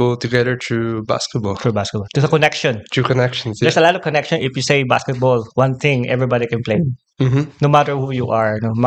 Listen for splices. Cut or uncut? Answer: uncut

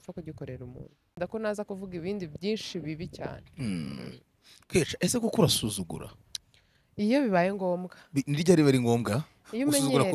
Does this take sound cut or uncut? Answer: cut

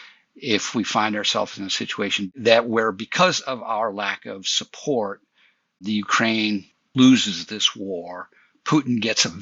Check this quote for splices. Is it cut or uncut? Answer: uncut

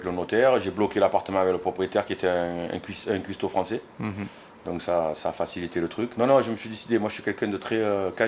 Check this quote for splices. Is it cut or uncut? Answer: uncut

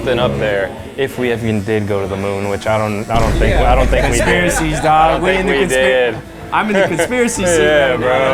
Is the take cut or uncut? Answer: uncut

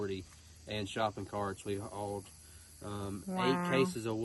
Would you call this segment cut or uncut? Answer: uncut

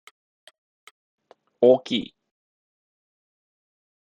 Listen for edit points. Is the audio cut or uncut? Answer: cut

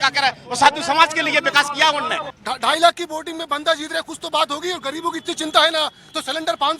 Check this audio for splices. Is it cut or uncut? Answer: cut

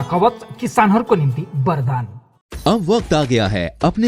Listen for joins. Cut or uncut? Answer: uncut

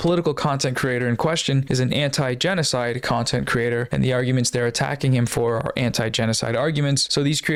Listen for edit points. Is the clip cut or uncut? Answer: uncut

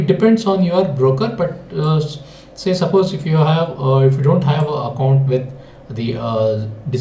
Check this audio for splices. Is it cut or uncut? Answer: uncut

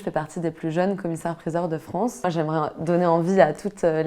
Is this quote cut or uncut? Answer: cut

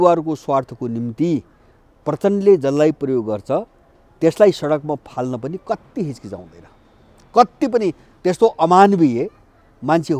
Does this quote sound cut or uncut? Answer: uncut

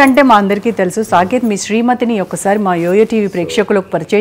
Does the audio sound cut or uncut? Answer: uncut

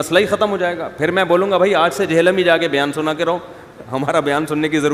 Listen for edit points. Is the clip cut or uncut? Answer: uncut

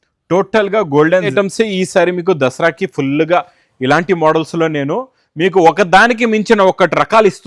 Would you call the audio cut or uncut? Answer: cut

